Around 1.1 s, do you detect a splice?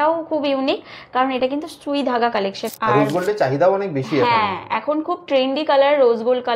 no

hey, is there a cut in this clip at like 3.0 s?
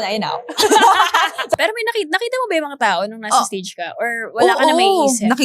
no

